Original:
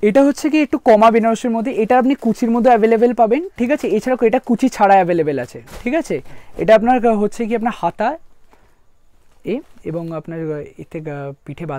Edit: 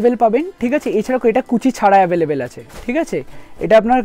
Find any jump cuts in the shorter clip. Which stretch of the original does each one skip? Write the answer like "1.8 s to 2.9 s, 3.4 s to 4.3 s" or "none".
none

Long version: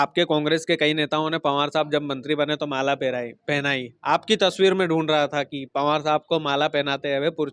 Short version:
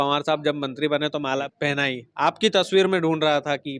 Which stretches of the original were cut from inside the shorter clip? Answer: 2.9 s to 3.3 s

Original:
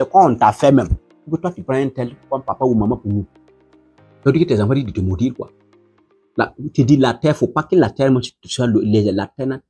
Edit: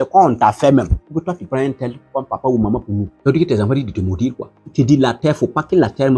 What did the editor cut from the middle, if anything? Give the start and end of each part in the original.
1.0 s to 1.2 s, 3.3 s to 4.1 s, 5.6 s to 6.6 s

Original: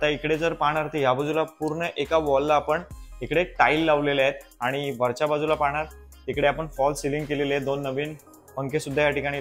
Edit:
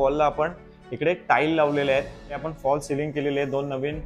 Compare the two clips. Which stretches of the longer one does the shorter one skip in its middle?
4.7 s to 6.5 s

